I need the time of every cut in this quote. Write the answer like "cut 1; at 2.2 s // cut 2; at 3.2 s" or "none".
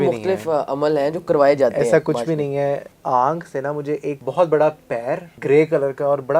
cut 1; at 2.9 s // cut 2; at 4.2 s // cut 3; at 5.3 s